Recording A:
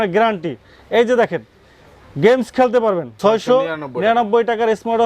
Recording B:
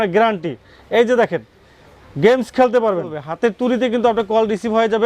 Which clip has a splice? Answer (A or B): B